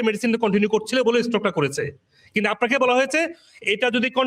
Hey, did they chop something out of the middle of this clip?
no; 0 cuts

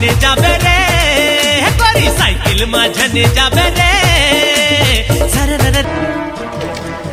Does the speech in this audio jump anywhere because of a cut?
no; 0 cuts

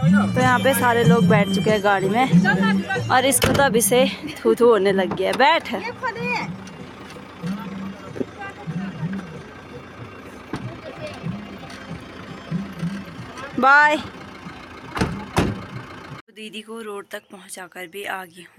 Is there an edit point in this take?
no; 0 cuts

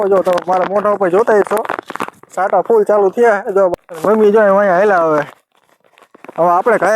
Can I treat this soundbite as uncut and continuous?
no; 1 cut; at 3.7 s

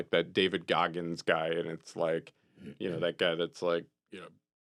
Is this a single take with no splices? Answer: yes; 0 cuts

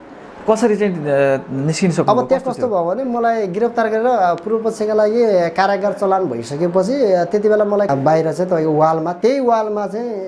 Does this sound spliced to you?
yes; 1 cut; at 7.9 s

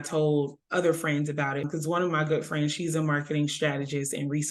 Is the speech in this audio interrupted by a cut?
yes; 1 cut; at 1.7 s

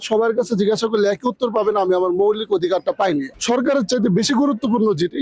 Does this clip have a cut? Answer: yes; 1 cut; at 3.3 s

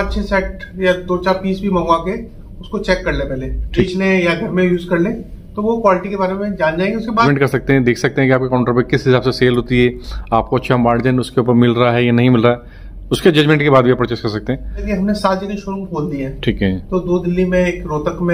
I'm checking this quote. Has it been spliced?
yes; 3 cuts; at 3.9 s, 7.3 s, 14.8 s

